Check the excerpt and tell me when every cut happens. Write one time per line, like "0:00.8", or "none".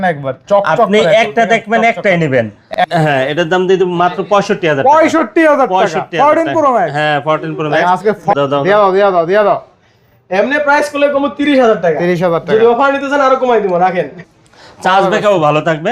0:02.6
0:08.3
0:14.2